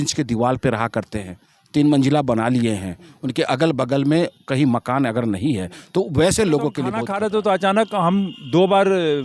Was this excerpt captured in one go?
no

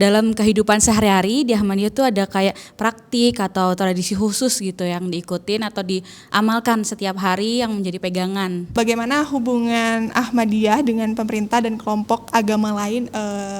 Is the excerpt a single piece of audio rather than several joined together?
no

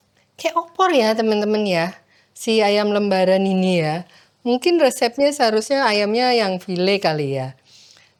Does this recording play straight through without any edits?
yes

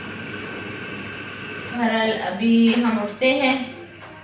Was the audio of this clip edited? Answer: yes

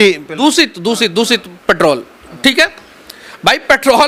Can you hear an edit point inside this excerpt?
no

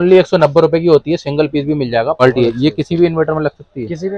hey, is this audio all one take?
no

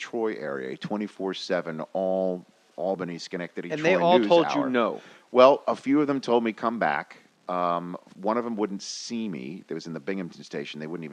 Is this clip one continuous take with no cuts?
yes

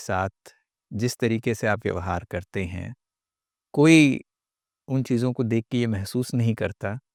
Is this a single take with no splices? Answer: yes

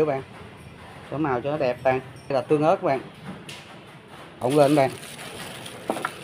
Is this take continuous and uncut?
no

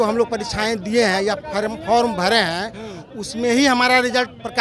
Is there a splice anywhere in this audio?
no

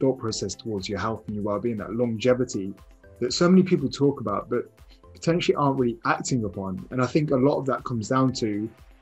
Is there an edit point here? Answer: no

